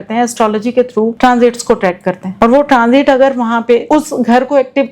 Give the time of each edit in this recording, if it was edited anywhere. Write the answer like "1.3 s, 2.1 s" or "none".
1.1 s, 2.2 s, 3.8 s